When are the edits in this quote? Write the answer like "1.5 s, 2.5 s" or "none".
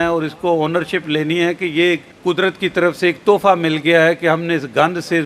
2.1 s